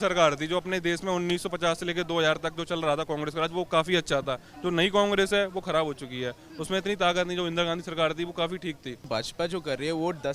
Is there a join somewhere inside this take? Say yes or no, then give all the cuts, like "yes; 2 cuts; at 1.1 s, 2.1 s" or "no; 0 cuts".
yes; 1 cut; at 9.1 s